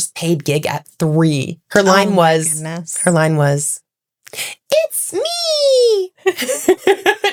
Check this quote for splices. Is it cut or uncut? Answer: uncut